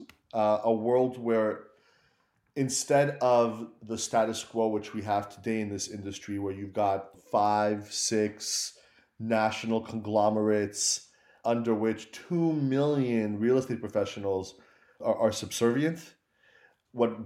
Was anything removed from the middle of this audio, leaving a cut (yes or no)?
yes